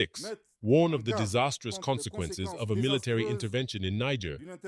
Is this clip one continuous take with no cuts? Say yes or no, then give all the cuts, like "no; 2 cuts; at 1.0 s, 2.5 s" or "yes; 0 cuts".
yes; 0 cuts